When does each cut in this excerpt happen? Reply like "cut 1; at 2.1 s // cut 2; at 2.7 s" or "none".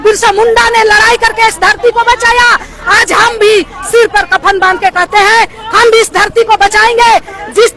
none